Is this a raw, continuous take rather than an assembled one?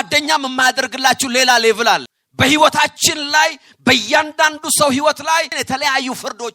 no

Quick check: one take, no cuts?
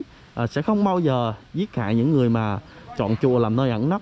yes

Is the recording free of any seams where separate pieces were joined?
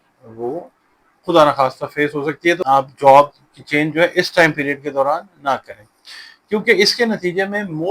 no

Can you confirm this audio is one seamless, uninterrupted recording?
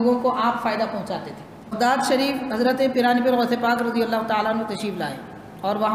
no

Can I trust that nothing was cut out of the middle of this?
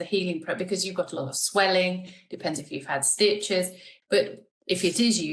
no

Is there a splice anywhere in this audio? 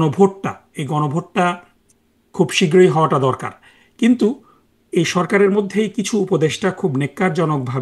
no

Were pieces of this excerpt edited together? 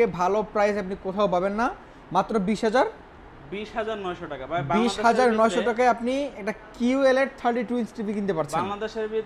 no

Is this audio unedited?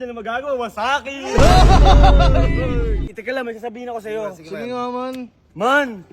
no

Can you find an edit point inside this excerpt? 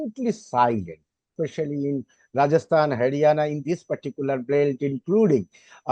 yes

